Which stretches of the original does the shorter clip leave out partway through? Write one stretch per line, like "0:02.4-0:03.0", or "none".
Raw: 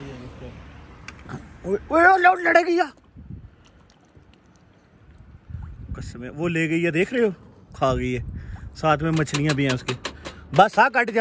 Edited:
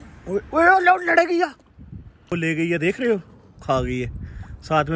0:03.5-0:06.2